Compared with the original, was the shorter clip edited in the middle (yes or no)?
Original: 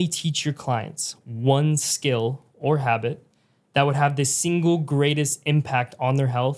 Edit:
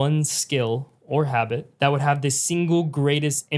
yes